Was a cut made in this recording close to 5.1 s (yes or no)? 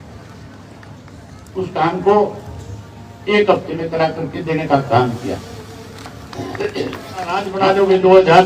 no